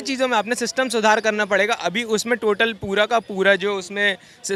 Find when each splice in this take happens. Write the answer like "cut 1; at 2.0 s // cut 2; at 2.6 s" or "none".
none